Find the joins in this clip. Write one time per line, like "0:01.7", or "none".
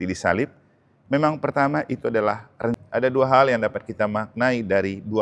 0:02.8